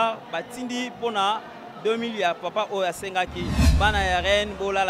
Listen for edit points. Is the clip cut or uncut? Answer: cut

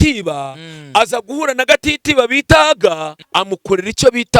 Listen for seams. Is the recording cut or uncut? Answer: cut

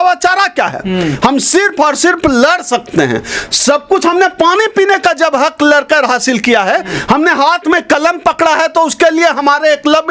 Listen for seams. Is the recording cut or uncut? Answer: uncut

